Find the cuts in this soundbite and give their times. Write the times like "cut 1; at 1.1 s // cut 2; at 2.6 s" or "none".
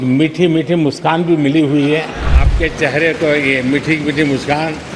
cut 1; at 2.4 s